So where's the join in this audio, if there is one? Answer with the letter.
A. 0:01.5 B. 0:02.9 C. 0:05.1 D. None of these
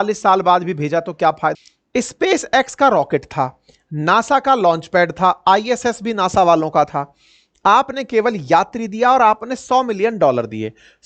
A